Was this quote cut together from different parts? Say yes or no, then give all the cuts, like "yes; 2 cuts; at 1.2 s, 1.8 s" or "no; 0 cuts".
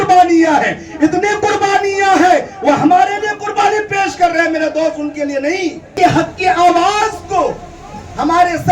yes; 1 cut; at 5.9 s